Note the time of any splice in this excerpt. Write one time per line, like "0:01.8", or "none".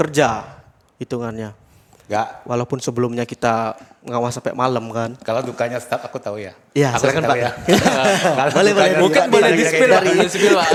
none

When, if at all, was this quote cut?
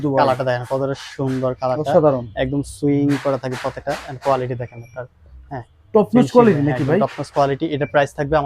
none

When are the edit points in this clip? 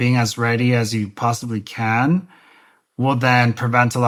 none

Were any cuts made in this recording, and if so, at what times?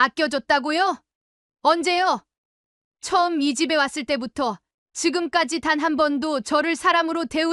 none

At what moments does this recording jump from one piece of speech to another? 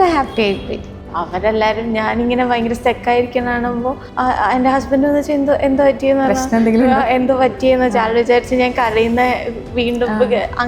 0:01.1

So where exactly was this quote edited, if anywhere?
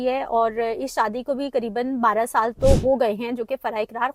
none

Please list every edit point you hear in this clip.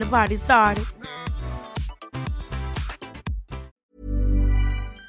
0:03.8

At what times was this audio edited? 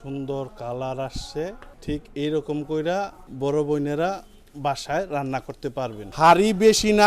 0:01.7
0:03.2
0:06.0

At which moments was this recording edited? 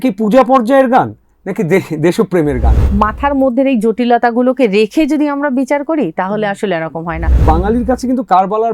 0:02.8
0:07.4

